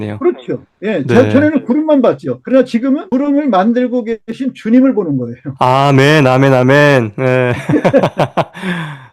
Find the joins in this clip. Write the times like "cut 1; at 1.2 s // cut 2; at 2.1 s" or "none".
cut 1; at 2.6 s